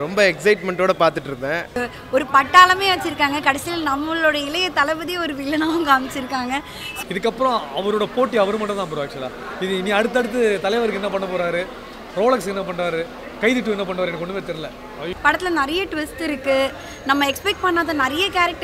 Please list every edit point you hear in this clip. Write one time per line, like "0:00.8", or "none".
0:01.8
0:06.8
0:15.1